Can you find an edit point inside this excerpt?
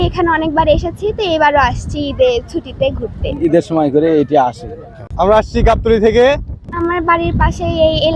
yes; 2 cuts; at 3.4 s, 6.8 s

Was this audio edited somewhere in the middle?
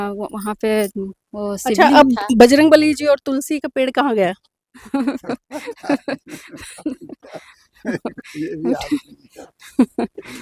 no; 0 cuts

